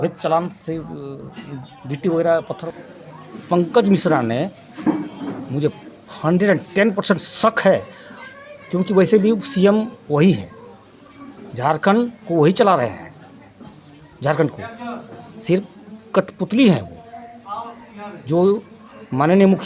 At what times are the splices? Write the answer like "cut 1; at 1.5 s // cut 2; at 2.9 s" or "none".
cut 1; at 2.6 s